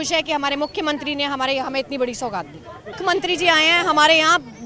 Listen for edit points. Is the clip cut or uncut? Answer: cut